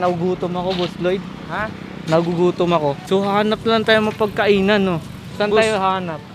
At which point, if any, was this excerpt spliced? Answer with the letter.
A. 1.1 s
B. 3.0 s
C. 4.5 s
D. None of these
B